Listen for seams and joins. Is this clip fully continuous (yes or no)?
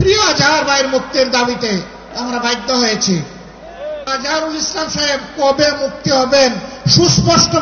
no